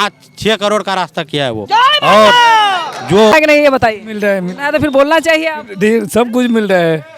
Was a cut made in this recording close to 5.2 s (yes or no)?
no